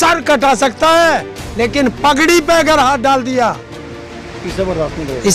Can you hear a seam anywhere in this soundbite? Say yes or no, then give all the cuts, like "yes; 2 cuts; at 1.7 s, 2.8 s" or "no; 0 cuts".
no; 0 cuts